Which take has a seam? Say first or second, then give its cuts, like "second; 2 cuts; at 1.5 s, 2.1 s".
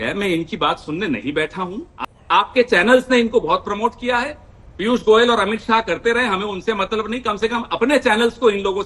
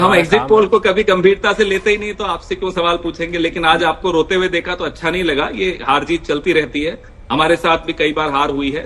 first; 1 cut; at 1.9 s